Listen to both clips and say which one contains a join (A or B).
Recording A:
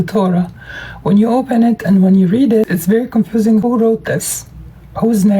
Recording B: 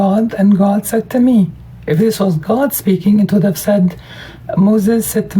A